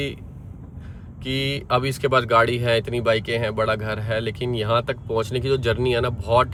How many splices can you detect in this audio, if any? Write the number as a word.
zero